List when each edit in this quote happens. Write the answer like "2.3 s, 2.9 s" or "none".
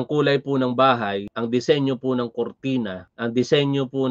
1.3 s, 3.0 s